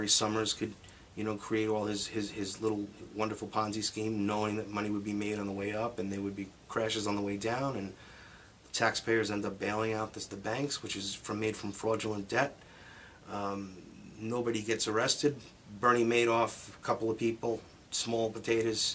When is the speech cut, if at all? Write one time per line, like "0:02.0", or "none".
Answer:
0:07.5